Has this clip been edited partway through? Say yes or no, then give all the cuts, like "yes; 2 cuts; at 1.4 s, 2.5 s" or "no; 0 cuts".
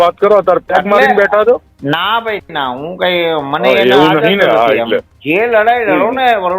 yes; 1 cut; at 5.1 s